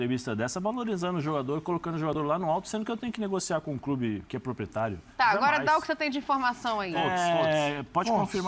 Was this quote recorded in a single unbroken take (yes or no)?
yes